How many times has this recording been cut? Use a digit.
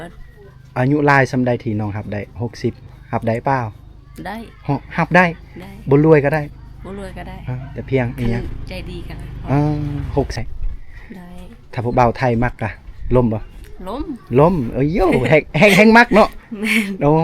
1